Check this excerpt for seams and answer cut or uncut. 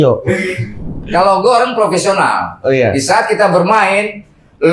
cut